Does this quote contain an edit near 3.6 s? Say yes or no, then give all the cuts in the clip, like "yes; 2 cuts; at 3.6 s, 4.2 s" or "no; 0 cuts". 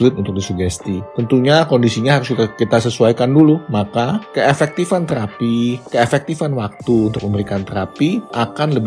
yes; 1 cut; at 3.6 s